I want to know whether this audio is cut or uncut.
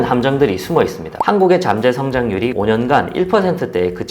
cut